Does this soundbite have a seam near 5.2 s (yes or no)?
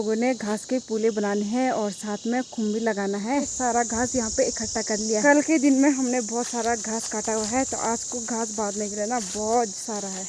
yes